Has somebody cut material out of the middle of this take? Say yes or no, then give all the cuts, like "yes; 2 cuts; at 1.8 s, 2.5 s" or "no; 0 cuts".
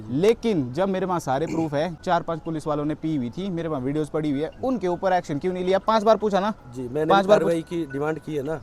yes; 1 cut; at 2.0 s